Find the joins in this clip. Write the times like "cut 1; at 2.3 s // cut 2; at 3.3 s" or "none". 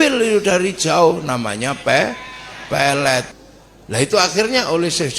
cut 1; at 3.3 s